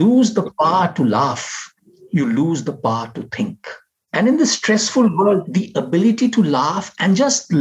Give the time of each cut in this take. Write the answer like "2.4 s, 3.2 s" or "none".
none